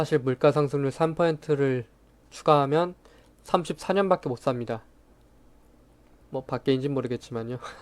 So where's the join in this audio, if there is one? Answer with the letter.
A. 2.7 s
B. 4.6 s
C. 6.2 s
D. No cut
C